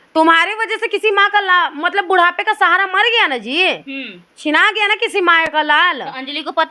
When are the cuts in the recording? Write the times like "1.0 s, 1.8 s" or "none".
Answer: none